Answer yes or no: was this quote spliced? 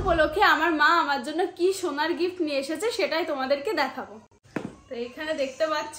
no